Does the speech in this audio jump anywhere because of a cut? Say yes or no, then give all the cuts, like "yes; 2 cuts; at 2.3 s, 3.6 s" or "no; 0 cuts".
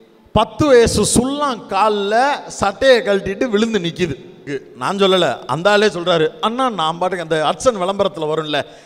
yes; 1 cut; at 4.6 s